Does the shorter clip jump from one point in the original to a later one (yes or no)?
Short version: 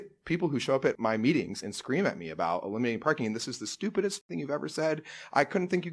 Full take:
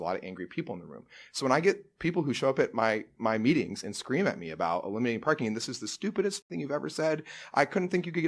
yes